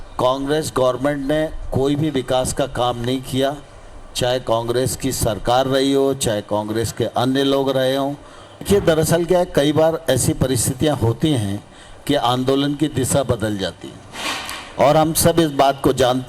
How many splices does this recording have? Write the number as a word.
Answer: one